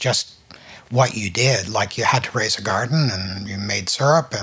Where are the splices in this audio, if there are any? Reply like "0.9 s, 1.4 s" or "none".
none